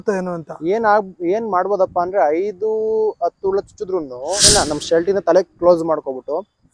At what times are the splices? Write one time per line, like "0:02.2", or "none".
0:04.5